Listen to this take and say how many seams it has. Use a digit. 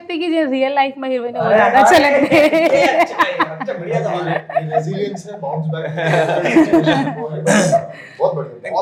0